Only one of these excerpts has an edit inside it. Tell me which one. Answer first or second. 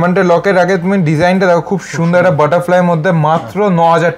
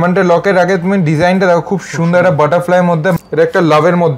second